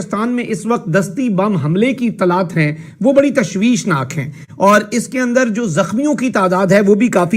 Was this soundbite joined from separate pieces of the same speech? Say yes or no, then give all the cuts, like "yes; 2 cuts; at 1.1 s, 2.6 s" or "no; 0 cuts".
no; 0 cuts